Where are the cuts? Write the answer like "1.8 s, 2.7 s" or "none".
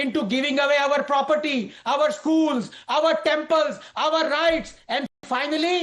none